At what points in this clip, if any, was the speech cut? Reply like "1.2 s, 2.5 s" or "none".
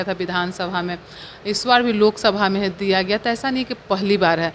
none

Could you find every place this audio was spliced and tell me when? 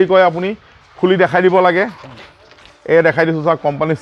none

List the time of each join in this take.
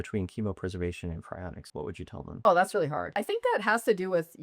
2.1 s, 3.1 s

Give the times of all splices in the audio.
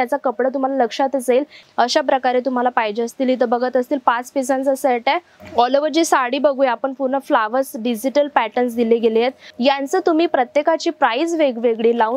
1.6 s, 5.4 s, 9.4 s

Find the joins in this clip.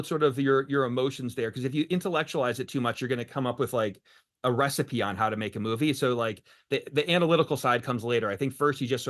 none

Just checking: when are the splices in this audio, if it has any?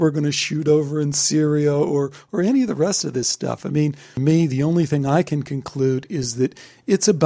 none

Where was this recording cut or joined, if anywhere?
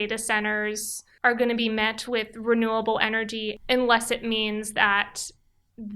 3.5 s

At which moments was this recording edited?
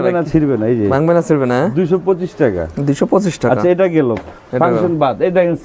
none

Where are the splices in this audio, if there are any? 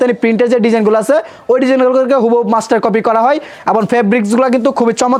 none

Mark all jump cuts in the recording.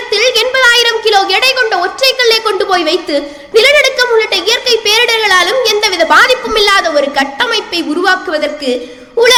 none

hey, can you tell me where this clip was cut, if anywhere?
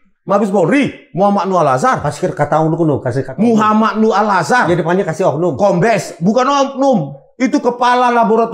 none

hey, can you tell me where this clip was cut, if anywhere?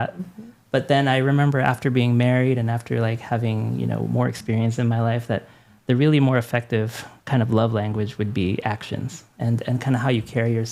none

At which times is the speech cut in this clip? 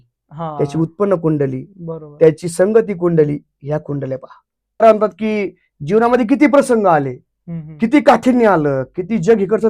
4.8 s

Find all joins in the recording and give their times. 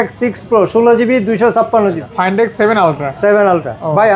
2.0 s

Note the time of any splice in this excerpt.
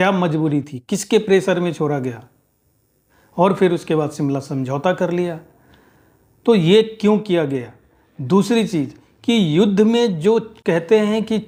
none

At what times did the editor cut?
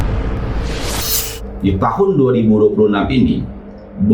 1.3 s

